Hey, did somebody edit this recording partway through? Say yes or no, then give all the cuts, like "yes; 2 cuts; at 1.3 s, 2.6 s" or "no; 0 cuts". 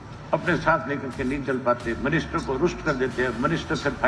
no; 0 cuts